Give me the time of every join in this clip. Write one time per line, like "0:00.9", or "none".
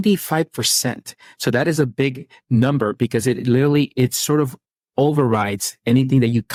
none